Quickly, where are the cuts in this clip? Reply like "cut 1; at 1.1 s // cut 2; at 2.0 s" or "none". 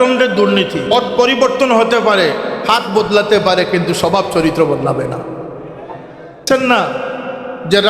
cut 1; at 0.9 s // cut 2; at 6.5 s